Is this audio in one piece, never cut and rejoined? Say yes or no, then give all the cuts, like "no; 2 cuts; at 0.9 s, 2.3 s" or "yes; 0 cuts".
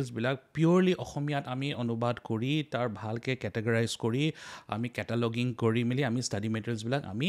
yes; 0 cuts